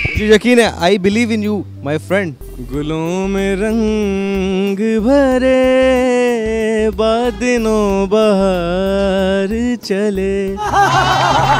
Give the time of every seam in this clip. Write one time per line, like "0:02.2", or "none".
0:02.5